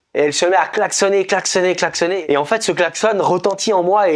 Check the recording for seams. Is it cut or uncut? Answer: cut